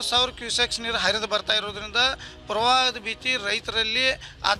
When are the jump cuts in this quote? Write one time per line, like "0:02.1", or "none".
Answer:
none